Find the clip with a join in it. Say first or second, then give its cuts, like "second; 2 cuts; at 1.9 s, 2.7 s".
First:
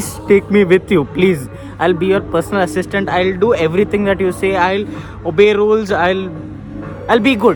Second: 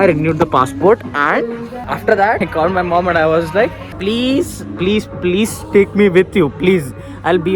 second; 2 cuts; at 1.8 s, 2.4 s